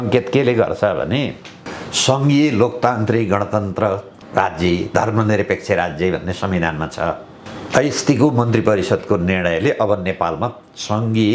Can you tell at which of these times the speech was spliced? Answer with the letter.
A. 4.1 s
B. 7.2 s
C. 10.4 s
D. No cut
A